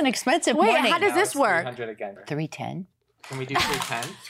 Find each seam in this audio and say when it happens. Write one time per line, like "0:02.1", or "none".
0:02.2